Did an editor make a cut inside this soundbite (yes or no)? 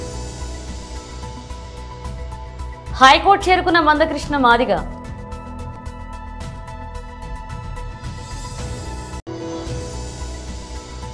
yes